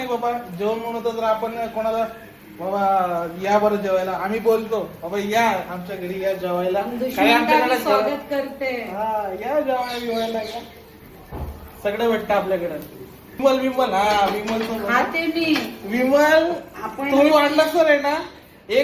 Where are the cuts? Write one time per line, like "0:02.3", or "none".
0:13.4